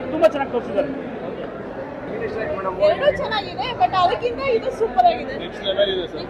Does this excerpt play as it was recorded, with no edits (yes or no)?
yes